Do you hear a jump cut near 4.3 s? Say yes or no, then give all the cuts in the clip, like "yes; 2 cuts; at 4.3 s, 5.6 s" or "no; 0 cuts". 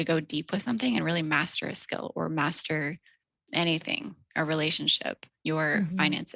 no; 0 cuts